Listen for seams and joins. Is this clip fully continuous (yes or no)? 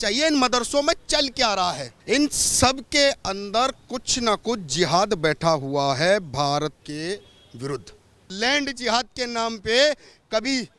no